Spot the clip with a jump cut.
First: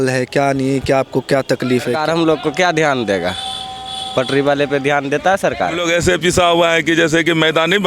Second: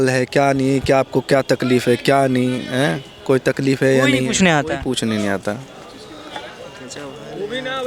first; 2 cuts; at 2.0 s, 5.8 s

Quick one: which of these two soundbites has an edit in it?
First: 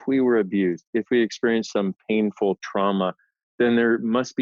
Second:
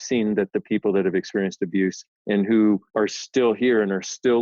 second; 2 cuts; at 2.1 s, 2.9 s

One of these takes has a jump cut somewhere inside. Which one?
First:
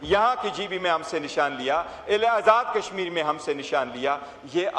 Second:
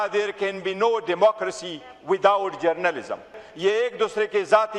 second; 1 cut; at 3.4 s

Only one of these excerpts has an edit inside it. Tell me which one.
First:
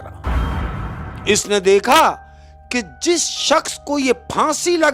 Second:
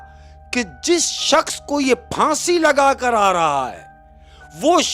first; 1 cut; at 1.1 s

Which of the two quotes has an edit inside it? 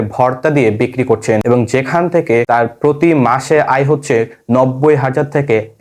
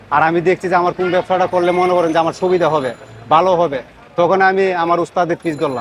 first; 2 cuts; at 1.4 s, 2.5 s

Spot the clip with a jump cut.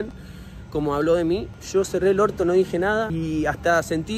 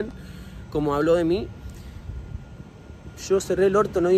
first; 2 cuts; at 1.6 s, 3.1 s

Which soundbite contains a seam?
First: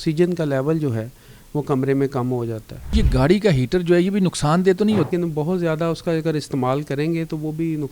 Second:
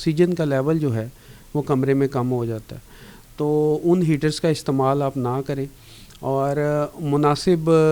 first; 2 cuts; at 2.9 s, 5.1 s

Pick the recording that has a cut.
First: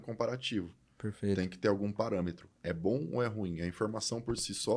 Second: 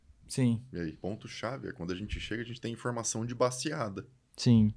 second; 1 cut; at 1.0 s

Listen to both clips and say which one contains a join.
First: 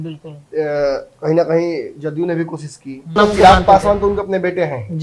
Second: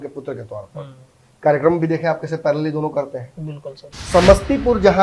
first; 1 cut; at 3.2 s

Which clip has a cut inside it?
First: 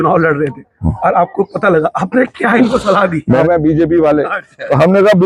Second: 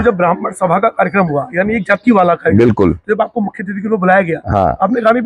first; 1 cut; at 3.4 s

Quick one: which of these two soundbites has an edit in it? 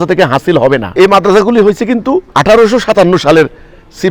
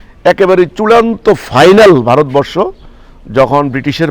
first; 2 cuts; at 0.9 s, 2.3 s

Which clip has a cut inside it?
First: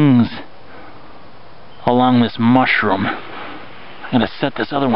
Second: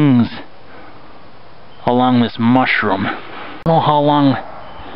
second; 1 cut; at 3.6 s

